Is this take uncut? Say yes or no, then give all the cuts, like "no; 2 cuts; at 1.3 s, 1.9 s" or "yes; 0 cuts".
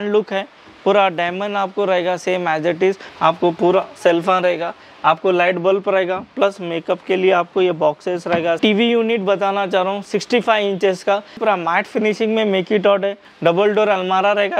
no; 4 cuts; at 3.1 s, 8.6 s, 11.4 s, 13.3 s